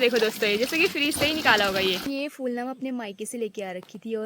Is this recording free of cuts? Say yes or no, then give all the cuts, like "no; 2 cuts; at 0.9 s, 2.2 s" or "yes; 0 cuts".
no; 1 cut; at 2.1 s